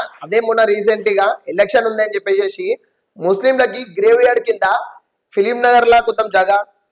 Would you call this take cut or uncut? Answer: uncut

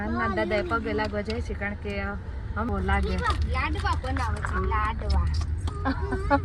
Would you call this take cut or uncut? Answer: cut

